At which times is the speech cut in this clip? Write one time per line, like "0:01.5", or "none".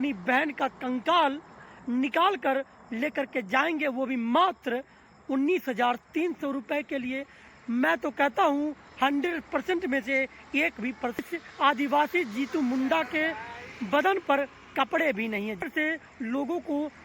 0:11.2
0:15.6